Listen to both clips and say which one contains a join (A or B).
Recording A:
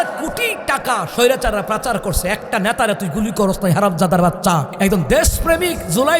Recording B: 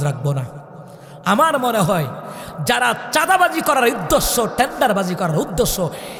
A